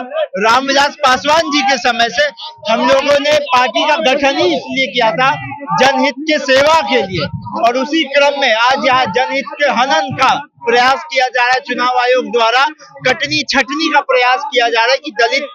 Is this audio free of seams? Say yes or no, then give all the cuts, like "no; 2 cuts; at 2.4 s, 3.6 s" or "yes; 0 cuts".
yes; 0 cuts